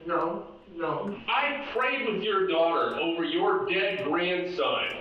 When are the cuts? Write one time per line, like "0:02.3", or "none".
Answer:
0:01.2